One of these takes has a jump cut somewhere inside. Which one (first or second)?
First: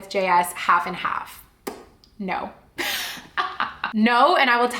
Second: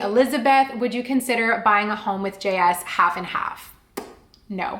first